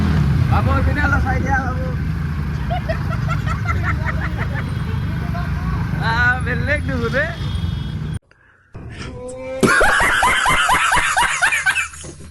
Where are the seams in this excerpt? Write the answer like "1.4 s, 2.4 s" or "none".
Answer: none